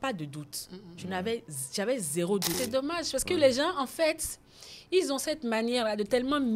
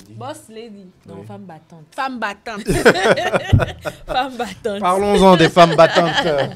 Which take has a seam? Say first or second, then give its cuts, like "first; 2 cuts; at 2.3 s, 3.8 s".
first; 1 cut; at 2.6 s